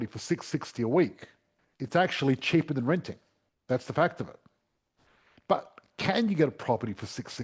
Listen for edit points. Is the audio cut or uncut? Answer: uncut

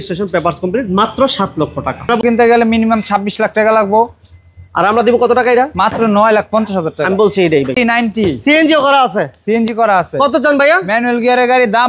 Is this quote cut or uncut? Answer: cut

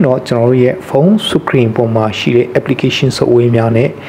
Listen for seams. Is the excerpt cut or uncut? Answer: uncut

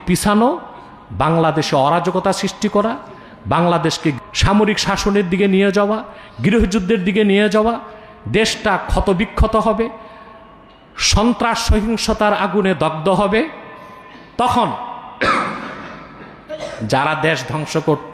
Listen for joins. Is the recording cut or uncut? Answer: cut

